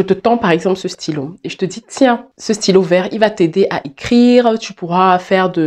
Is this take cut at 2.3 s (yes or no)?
yes